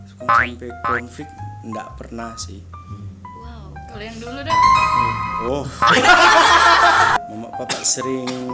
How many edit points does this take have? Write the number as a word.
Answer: one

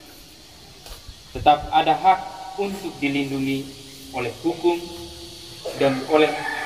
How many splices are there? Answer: zero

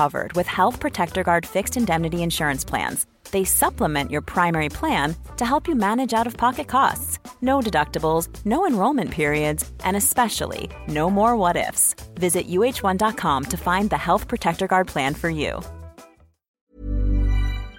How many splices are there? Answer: one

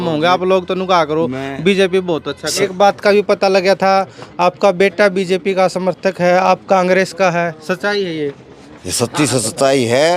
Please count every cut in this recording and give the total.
one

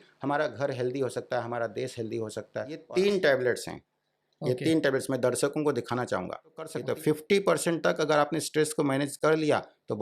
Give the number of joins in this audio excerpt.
two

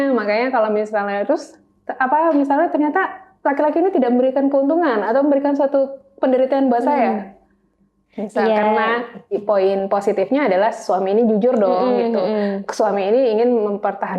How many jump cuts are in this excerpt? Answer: one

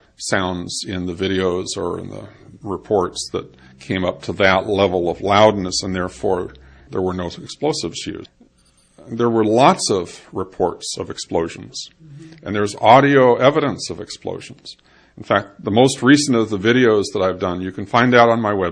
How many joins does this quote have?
one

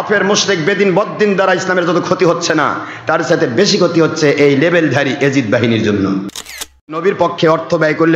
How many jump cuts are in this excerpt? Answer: one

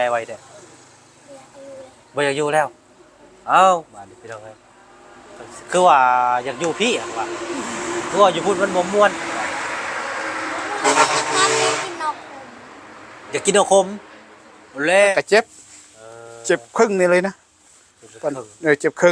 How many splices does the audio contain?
one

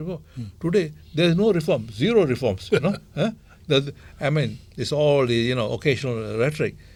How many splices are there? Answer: zero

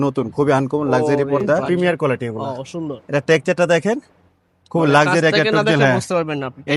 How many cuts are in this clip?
one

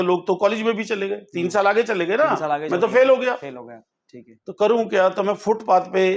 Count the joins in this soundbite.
zero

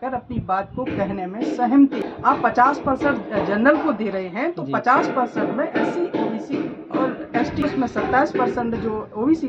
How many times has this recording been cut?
two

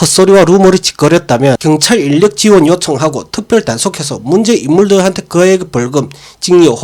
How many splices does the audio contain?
one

